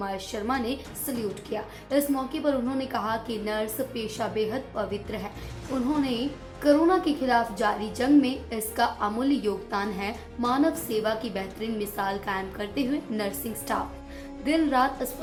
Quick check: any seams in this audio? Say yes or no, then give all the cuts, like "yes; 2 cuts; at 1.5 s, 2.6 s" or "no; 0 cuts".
no; 0 cuts